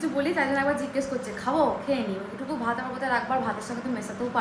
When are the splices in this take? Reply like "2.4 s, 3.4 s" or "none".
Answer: none